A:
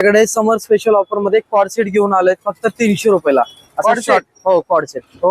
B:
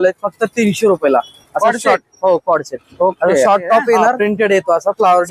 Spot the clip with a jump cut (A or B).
B